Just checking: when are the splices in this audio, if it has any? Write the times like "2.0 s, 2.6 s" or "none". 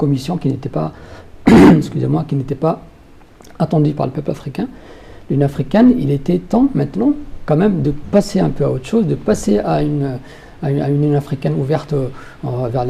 none